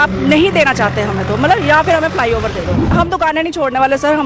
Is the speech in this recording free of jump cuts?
no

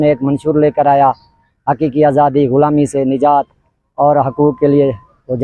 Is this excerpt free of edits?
yes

